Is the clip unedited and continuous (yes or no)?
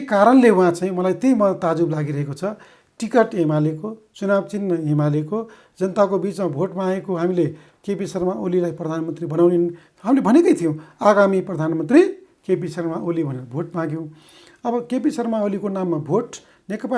yes